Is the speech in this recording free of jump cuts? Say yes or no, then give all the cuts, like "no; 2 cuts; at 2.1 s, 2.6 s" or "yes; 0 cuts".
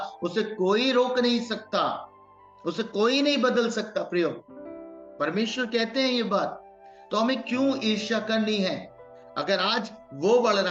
yes; 0 cuts